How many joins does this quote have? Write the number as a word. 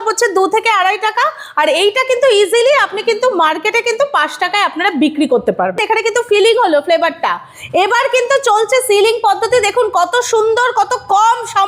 one